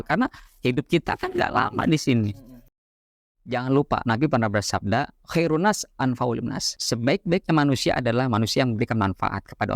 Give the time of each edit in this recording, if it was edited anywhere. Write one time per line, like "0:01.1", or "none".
0:03.1